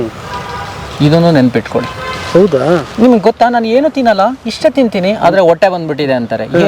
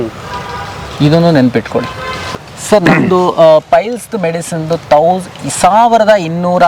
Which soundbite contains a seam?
second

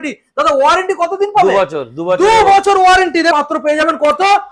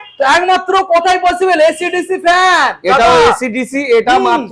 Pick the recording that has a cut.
first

